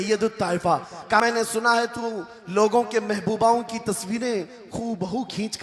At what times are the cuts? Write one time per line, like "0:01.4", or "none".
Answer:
0:01.2